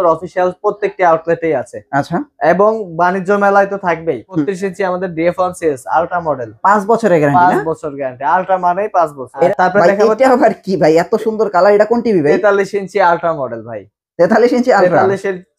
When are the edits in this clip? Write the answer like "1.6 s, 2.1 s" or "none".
4.5 s, 9.5 s